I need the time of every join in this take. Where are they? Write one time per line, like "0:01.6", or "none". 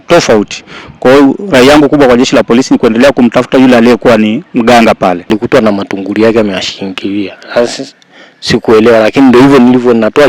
0:05.3

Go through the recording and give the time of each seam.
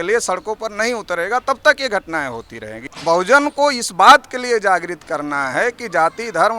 0:02.9

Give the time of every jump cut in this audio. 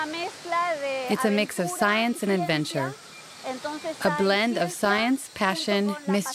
none

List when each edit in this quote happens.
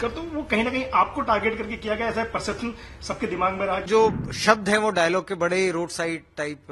0:03.9

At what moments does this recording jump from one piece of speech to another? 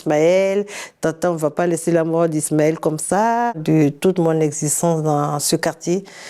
0:03.6

